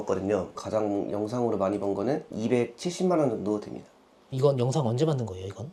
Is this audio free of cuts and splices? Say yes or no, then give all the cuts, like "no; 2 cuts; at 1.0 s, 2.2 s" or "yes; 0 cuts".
yes; 0 cuts